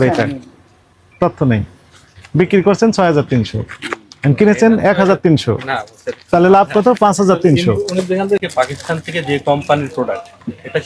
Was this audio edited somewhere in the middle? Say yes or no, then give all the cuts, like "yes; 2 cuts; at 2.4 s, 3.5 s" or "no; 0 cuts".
no; 0 cuts